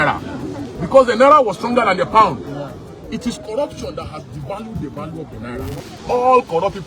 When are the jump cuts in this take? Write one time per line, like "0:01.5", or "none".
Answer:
0:05.8